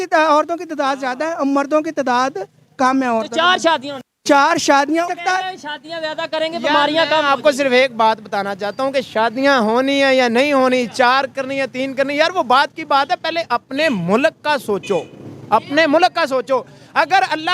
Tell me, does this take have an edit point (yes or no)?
yes